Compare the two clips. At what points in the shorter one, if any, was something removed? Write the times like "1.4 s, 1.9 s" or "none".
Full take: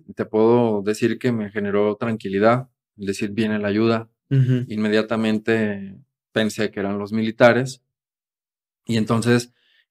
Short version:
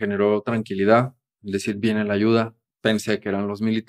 2.6 s